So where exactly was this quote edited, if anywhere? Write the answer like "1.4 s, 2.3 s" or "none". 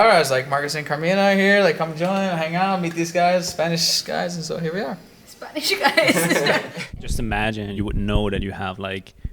6.8 s, 7.8 s